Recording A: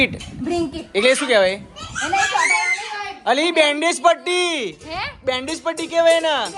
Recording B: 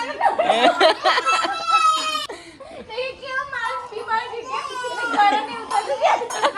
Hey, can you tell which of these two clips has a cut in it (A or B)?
B